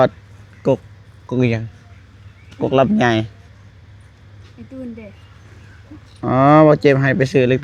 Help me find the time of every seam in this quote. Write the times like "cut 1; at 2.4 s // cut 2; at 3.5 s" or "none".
none